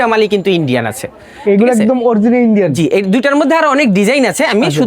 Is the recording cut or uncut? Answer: uncut